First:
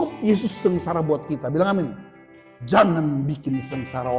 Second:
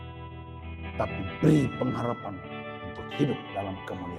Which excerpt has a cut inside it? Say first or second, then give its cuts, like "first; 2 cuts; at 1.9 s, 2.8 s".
second; 1 cut; at 1.0 s